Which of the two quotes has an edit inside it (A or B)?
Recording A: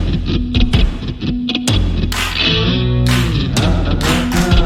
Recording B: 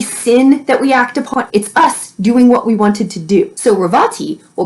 B